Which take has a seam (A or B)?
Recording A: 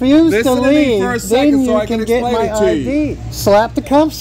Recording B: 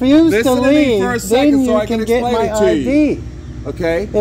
A